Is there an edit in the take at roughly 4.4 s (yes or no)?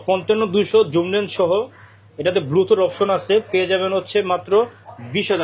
no